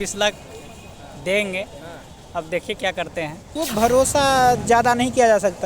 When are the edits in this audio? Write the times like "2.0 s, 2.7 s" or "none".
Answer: 3.4 s